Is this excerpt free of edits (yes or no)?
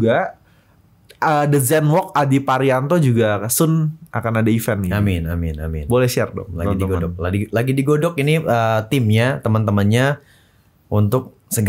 yes